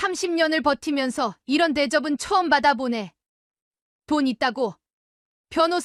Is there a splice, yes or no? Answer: no